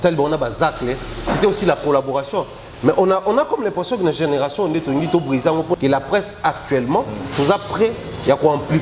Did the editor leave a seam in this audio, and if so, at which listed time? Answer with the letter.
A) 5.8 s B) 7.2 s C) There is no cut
A